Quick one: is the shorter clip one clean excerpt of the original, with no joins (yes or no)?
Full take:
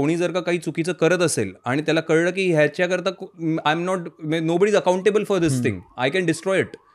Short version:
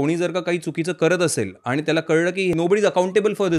no